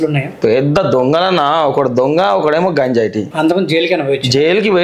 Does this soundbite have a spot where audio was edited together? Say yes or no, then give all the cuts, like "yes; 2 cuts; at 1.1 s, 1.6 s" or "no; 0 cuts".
yes; 1 cut; at 3.2 s